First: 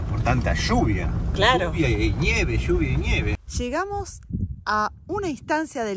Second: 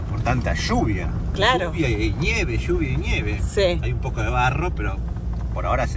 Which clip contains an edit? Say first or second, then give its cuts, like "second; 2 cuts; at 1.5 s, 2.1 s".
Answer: first; 1 cut; at 3.4 s